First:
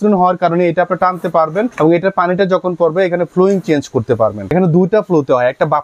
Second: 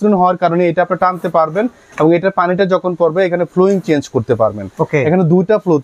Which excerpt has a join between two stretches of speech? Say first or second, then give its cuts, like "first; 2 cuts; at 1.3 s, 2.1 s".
first; 2 cuts; at 1.7 s, 4.5 s